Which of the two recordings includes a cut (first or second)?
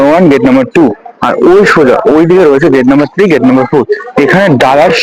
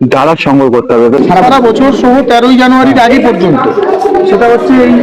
second